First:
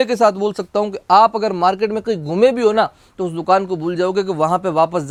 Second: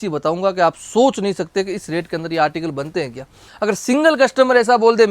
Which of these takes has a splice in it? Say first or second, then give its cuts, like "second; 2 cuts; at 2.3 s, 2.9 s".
second; 1 cut; at 3.5 s